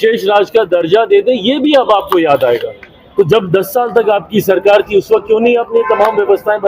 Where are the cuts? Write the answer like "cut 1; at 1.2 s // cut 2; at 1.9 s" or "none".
none